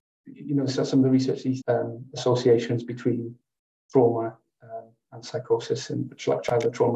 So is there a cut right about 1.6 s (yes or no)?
yes